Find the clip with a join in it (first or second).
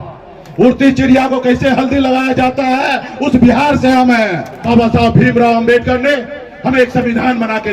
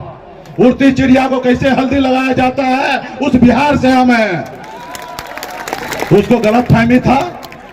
first